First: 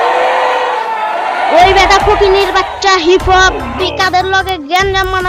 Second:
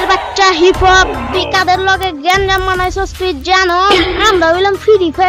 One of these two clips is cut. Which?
first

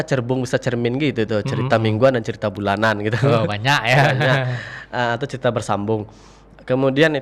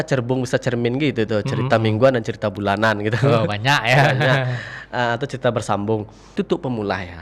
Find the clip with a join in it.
second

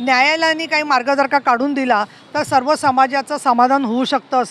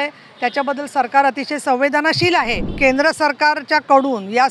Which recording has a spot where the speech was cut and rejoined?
second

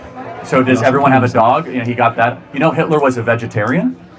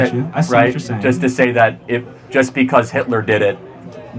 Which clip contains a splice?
second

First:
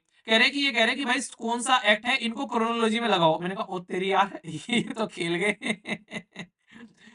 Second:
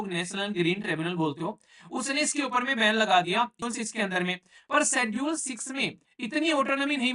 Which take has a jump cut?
second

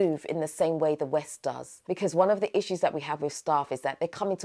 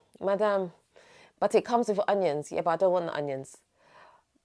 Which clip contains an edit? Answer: first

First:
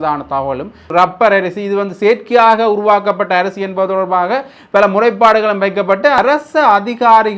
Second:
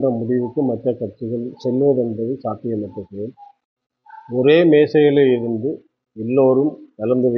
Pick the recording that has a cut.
first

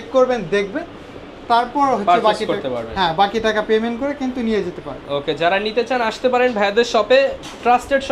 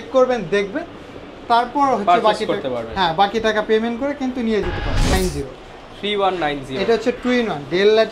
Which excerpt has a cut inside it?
second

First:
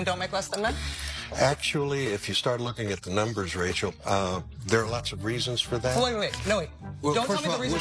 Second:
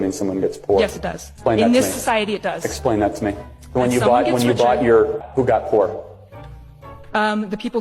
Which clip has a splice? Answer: second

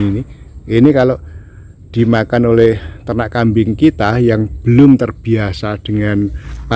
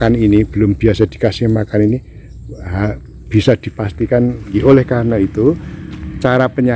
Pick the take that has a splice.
second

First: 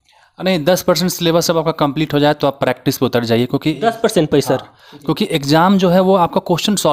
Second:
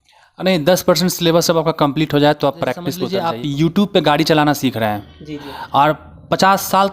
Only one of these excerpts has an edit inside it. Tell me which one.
second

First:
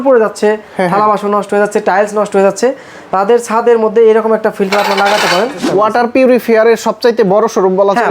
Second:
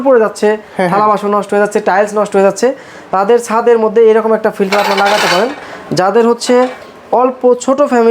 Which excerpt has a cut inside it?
first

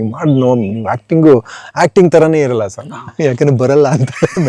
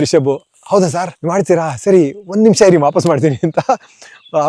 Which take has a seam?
second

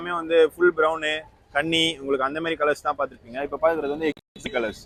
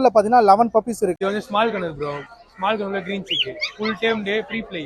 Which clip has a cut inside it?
second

